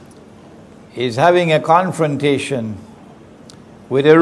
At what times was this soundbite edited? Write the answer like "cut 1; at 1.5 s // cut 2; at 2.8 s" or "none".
cut 1; at 2.3 s